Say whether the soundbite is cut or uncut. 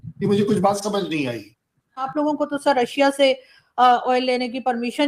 cut